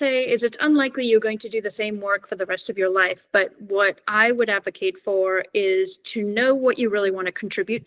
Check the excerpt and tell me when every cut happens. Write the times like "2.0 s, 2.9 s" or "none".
none